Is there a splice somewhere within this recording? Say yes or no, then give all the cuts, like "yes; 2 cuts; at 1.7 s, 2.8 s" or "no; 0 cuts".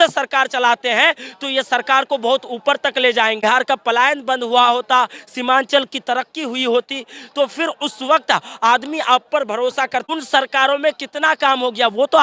yes; 2 cuts; at 3.4 s, 10.0 s